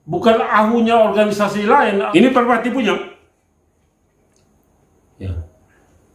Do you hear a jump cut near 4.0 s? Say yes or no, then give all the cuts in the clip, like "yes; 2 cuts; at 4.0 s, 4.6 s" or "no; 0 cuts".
no; 1 cut; at 2.1 s